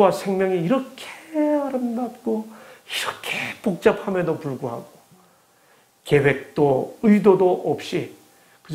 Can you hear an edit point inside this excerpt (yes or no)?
no